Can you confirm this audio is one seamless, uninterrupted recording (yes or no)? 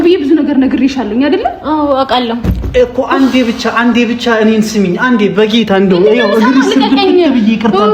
yes